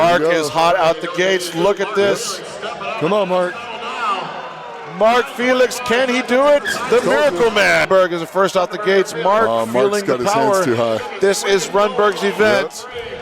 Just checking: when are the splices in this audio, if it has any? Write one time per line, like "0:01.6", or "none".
0:07.9